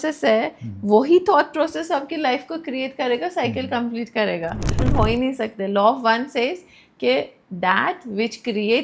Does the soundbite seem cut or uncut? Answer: cut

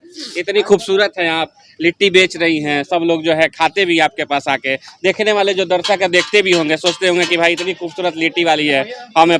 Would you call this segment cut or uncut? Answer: uncut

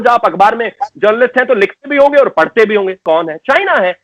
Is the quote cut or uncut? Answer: cut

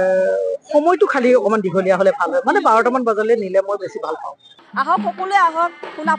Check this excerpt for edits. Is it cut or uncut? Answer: cut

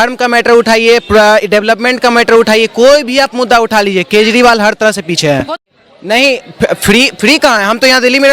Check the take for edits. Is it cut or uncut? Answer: cut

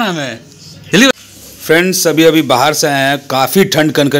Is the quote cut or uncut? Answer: cut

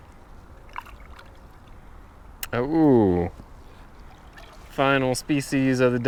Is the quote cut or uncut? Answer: uncut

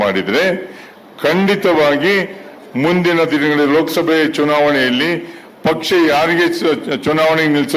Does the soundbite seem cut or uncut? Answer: uncut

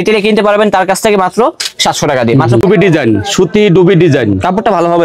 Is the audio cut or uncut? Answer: cut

